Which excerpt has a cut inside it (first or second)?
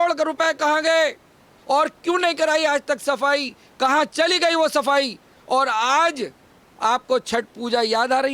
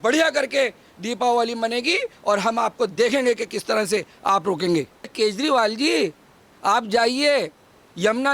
second